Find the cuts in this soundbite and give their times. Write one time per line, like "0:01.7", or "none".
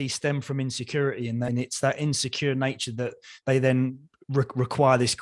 none